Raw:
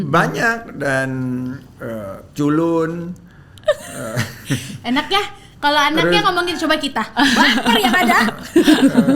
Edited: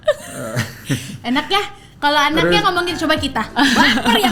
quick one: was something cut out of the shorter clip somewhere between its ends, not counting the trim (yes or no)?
no